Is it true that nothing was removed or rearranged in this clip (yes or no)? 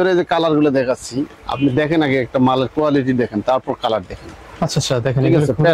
yes